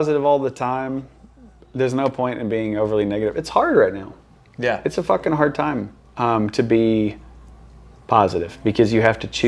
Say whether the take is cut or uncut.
uncut